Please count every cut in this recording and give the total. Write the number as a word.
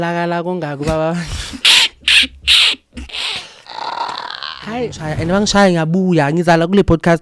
one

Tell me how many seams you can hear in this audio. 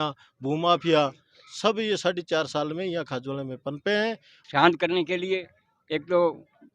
one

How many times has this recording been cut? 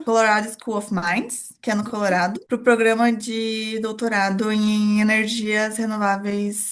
zero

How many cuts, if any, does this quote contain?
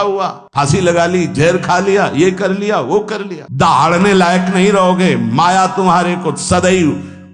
one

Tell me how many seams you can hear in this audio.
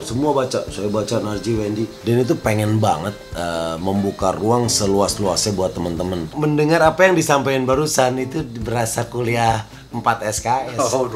two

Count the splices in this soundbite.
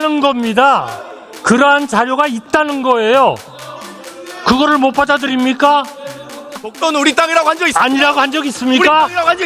one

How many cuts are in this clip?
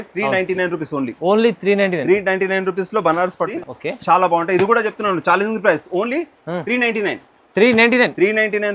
one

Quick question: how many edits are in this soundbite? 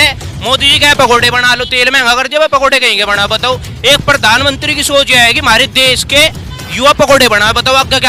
zero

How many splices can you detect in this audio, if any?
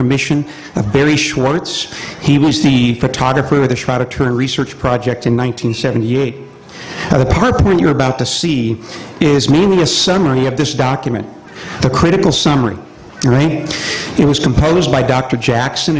one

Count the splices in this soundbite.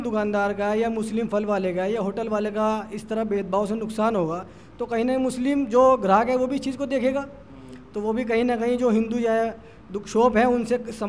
zero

